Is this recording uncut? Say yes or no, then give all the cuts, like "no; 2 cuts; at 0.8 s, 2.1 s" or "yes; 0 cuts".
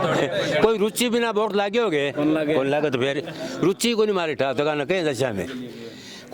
yes; 0 cuts